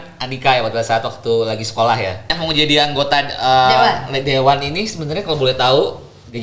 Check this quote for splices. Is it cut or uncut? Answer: cut